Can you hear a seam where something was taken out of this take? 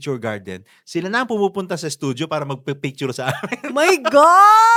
no; 0 cuts

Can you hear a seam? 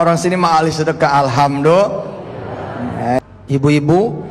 yes; 1 cut; at 3.2 s

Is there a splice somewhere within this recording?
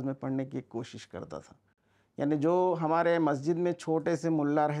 no; 0 cuts

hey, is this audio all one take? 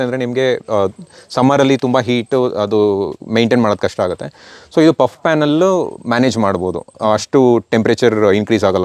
yes; 0 cuts

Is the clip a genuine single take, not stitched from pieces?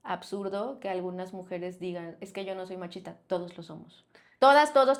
yes; 0 cuts

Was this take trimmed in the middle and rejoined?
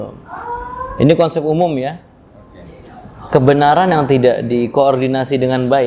no; 0 cuts

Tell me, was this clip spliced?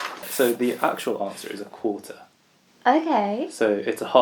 no; 0 cuts

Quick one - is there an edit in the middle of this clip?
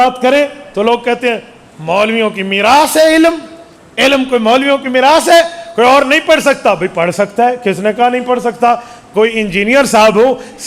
no; 0 cuts

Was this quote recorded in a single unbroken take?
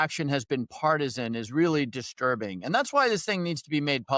yes; 0 cuts

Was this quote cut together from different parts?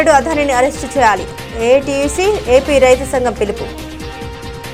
no; 0 cuts

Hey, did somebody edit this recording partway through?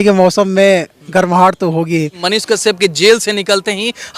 yes; 1 cut; at 2.2 s

